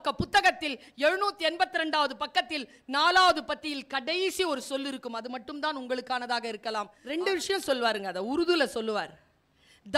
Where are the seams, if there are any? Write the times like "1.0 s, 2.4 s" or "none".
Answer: 7.0 s